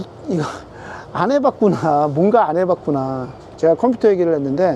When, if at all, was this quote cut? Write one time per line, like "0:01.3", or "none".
0:03.4